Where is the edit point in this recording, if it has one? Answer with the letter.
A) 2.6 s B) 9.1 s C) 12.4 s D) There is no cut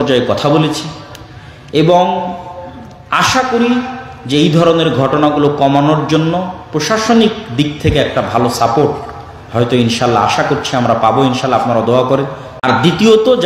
C